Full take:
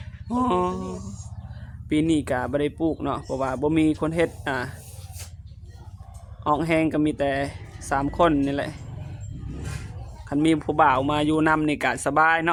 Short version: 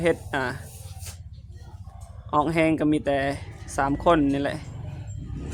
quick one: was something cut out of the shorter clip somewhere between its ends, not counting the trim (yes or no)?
no